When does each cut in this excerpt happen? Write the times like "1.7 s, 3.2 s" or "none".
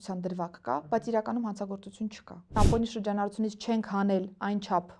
2.6 s